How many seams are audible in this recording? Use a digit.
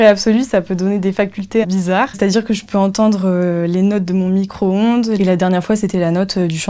2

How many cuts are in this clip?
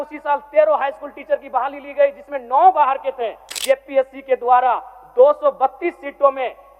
1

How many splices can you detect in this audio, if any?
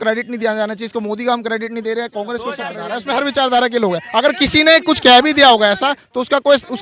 1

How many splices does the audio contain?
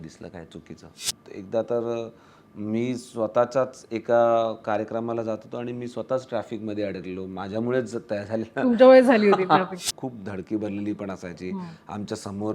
2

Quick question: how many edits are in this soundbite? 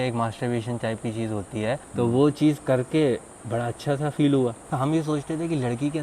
2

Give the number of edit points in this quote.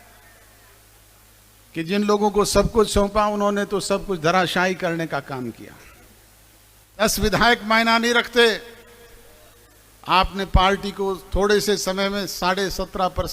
1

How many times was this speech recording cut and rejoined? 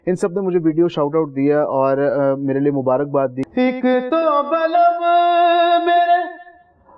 1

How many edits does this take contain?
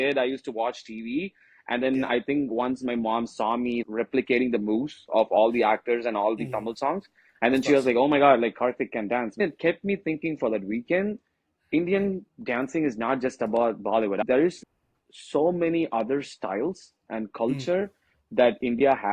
3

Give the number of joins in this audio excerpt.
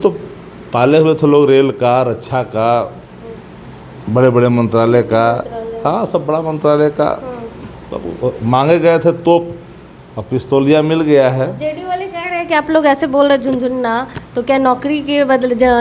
0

